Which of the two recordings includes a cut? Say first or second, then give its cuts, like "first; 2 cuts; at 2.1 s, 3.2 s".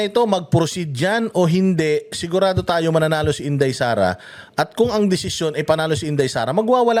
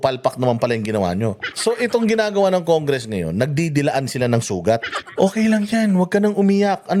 second; 2 cuts; at 1.5 s, 5.0 s